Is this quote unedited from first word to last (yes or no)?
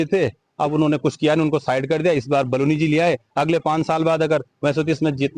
yes